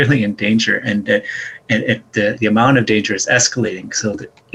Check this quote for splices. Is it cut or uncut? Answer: uncut